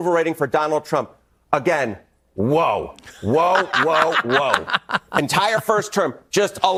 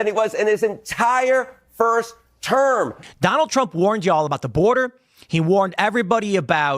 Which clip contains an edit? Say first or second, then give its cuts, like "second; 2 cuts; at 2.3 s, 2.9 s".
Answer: second; 1 cut; at 3.0 s